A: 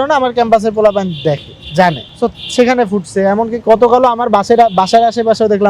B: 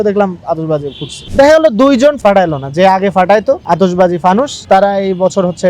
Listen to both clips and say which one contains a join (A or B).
B